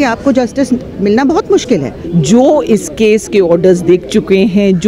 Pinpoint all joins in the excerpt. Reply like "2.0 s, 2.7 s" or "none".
2.0 s